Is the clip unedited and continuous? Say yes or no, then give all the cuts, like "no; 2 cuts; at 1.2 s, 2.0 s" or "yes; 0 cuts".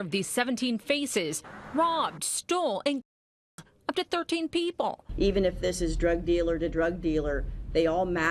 yes; 0 cuts